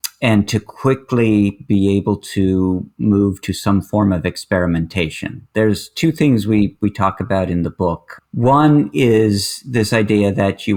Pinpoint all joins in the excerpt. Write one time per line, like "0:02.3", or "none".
none